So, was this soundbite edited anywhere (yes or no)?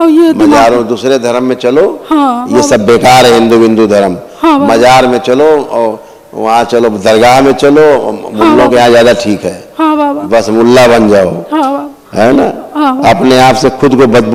no